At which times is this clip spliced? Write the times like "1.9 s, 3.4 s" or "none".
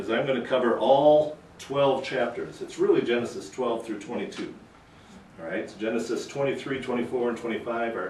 4.5 s